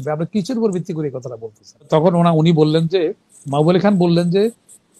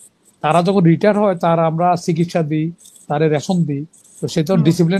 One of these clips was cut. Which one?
first; 1 cut; at 1.9 s

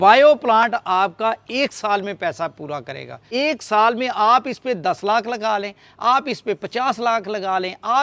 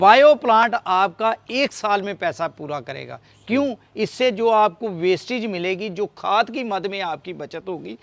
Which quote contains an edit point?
first; 1 cut; at 3.1 s

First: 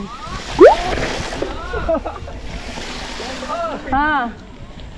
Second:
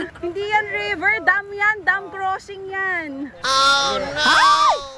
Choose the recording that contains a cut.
second; 1 cut; at 4.1 s

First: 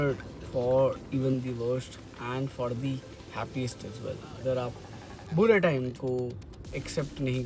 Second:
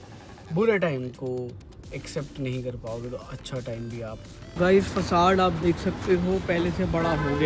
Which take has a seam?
second; 1 cut; at 4.4 s

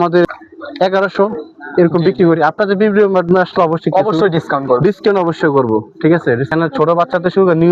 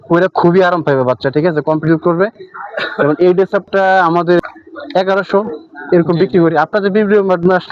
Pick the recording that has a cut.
first; 1 cut; at 6.5 s

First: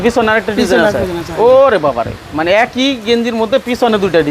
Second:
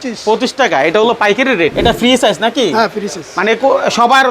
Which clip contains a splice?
second; 1 cut; at 1.7 s

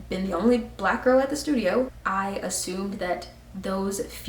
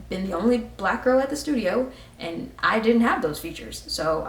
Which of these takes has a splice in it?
first; 1 cut; at 2.0 s

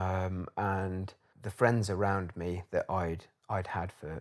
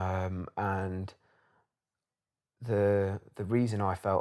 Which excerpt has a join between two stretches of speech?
first; 1 cut; at 1.4 s

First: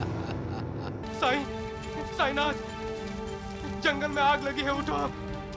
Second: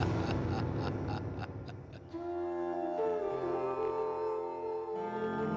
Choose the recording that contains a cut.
first; 1 cut; at 1.0 s

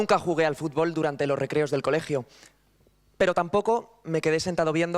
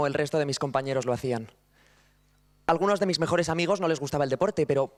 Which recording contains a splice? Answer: first; 1 cut; at 2.4 s

